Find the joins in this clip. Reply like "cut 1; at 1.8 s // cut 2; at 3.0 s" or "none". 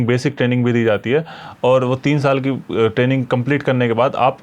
none